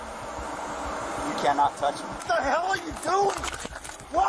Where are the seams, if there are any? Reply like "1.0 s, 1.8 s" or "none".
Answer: 2.2 s